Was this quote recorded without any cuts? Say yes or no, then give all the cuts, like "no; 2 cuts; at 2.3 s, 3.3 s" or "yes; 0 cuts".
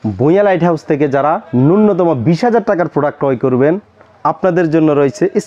yes; 0 cuts